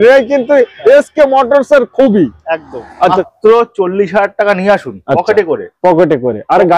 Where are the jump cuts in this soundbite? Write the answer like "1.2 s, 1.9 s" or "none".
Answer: 3.2 s